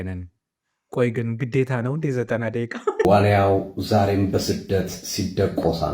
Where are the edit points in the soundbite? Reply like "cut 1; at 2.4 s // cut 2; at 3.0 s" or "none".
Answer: cut 1; at 3.0 s